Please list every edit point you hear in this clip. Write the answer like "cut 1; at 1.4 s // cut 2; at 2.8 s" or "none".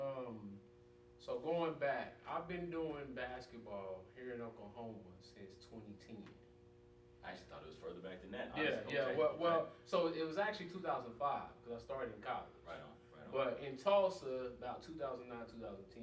none